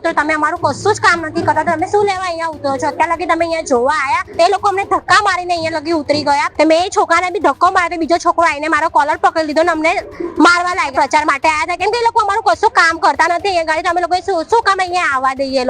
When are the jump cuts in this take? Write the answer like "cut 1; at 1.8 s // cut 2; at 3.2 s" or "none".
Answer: cut 1; at 4.3 s // cut 2; at 6.5 s // cut 3; at 10.9 s

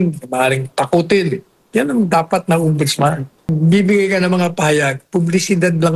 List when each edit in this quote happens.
cut 1; at 3.5 s

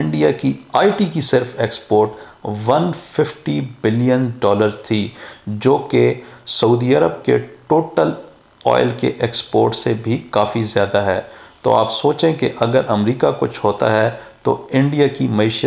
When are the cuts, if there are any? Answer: none

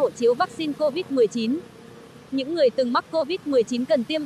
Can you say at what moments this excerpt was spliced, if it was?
cut 1; at 2.2 s

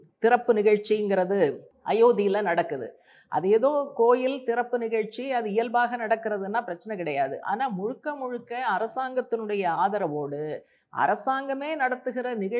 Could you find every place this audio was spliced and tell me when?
cut 1; at 1.7 s

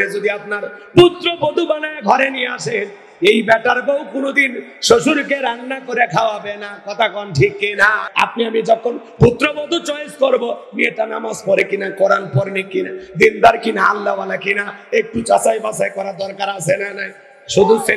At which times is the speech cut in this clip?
cut 1; at 8.0 s

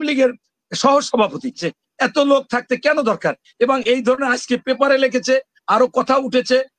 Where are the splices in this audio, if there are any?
cut 1; at 1.7 s

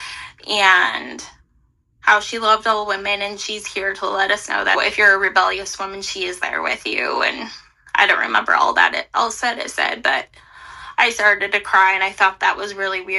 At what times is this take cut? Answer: cut 1; at 4.8 s

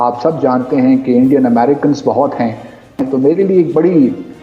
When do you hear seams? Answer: cut 1; at 3.0 s

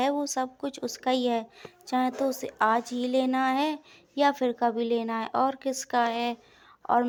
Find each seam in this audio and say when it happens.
none

